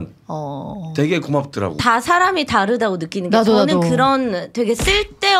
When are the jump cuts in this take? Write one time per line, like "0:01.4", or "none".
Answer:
0:01.8